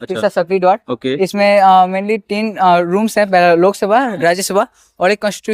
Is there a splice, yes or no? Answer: no